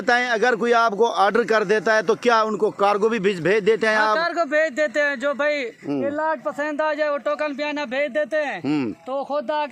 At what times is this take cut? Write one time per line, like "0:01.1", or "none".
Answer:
none